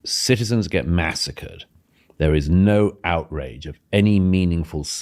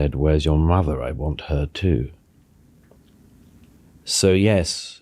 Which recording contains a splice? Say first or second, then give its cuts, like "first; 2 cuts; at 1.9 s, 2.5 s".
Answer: second; 1 cut; at 3.8 s